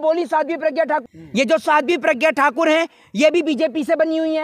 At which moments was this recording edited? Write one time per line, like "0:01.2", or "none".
0:01.0